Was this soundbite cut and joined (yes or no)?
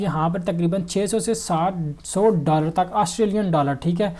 no